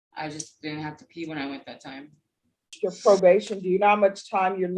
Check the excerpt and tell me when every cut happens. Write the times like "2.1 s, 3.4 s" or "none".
2.8 s